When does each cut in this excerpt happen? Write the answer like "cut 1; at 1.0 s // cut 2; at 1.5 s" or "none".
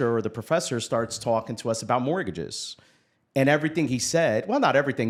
none